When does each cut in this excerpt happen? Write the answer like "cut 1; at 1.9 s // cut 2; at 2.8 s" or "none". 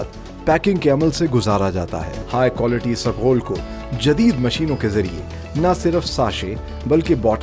cut 1; at 2.1 s